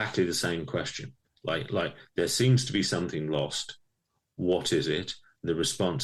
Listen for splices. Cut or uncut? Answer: uncut